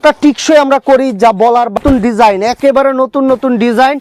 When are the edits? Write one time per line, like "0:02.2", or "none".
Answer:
0:01.8

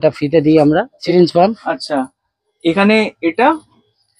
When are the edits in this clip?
0:01.1

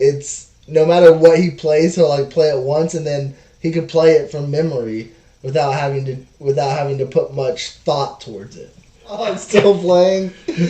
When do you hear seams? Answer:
0:09.4

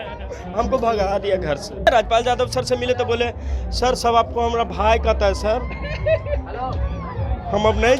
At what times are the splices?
0:01.9

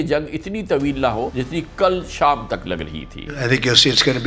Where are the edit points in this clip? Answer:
0:01.4
0:03.4

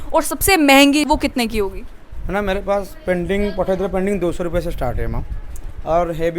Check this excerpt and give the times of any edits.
0:01.1

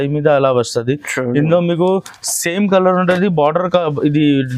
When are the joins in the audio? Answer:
none

